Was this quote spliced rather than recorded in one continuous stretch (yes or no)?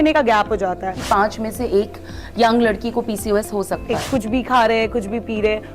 yes